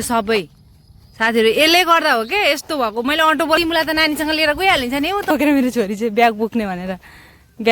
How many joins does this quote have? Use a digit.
2